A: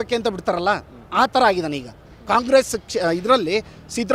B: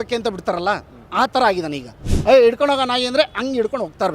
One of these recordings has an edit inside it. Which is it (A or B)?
B